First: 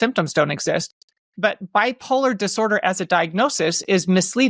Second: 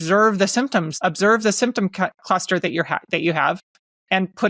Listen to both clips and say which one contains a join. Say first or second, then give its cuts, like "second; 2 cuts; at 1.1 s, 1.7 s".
second; 1 cut; at 0.9 s